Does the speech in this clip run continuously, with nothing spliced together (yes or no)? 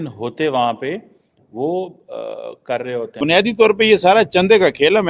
no